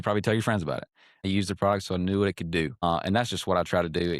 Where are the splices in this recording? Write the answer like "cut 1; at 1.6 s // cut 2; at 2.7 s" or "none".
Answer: cut 1; at 1.3 s // cut 2; at 2.8 s